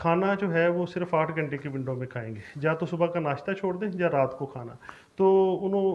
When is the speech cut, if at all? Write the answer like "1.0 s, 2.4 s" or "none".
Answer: none